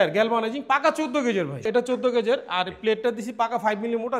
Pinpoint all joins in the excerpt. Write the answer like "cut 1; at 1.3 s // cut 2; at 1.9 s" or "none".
cut 1; at 1.6 s